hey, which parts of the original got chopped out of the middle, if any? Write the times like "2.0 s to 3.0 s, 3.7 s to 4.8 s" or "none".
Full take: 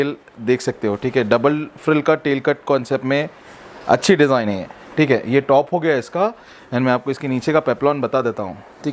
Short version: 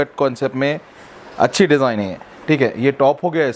none